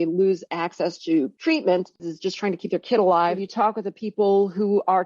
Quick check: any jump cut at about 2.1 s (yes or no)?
yes